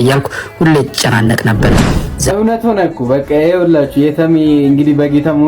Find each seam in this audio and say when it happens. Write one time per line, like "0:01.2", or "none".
0:02.1